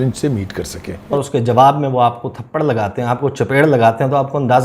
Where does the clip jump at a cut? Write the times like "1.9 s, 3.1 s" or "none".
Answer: 1.1 s